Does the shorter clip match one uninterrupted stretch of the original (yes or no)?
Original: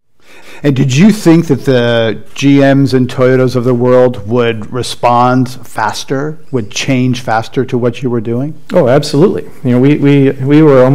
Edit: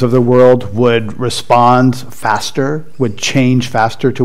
yes